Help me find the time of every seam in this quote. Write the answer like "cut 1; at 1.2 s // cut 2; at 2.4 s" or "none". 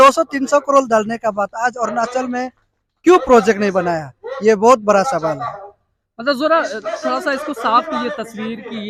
none